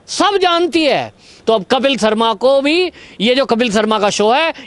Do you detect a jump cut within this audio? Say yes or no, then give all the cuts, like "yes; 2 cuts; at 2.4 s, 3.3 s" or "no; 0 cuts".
no; 0 cuts